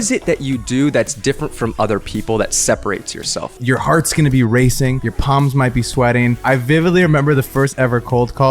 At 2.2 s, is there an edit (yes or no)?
no